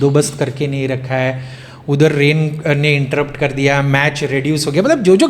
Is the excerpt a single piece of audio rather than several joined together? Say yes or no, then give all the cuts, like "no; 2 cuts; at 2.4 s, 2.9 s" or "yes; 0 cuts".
yes; 0 cuts